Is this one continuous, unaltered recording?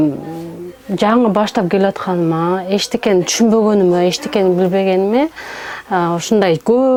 yes; 0 cuts

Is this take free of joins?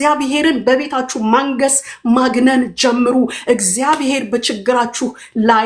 yes; 0 cuts

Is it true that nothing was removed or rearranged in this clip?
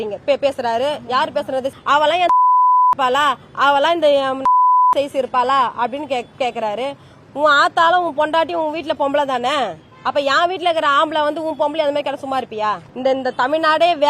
no; 2 cuts; at 1.7 s, 12.9 s

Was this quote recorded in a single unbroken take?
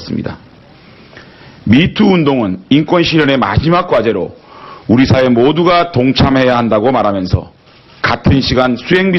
no; 1 cut; at 1.6 s

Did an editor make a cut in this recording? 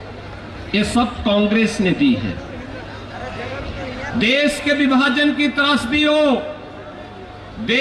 no; 0 cuts

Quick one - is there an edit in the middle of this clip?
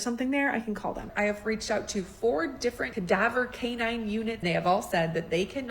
yes; 3 cuts; at 1.1 s, 2.9 s, 4.4 s

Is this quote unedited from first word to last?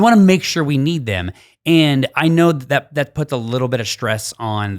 yes; 0 cuts

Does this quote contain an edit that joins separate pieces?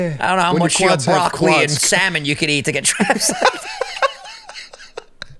no; 0 cuts

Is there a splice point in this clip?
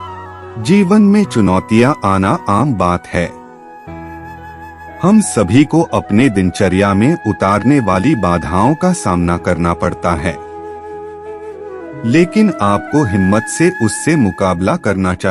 yes; 2 cuts; at 3.3 s, 4.7 s

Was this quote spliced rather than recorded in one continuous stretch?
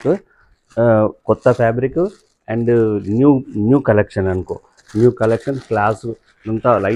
no; 0 cuts

